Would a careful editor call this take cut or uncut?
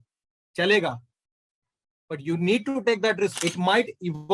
cut